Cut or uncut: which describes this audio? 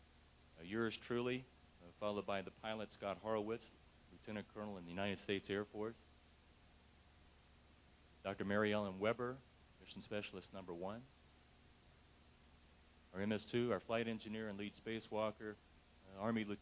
cut